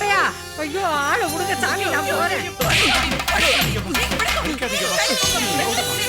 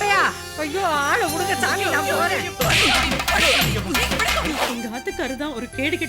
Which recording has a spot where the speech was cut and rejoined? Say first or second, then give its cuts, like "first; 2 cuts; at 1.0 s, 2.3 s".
second; 1 cut; at 4.6 s